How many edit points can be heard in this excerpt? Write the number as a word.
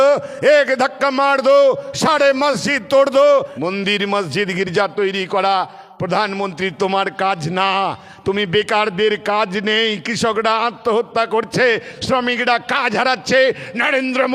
one